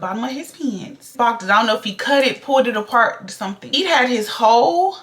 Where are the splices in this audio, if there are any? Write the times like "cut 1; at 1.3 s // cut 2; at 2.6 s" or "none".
cut 1; at 3.7 s